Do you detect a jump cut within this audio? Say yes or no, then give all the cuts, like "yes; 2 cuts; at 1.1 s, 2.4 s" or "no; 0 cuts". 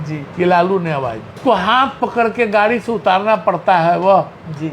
yes; 1 cut; at 1.4 s